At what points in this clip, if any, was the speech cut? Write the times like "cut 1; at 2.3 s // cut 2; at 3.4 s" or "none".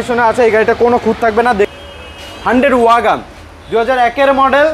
cut 1; at 1.7 s